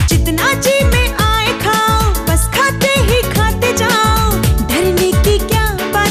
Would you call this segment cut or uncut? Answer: uncut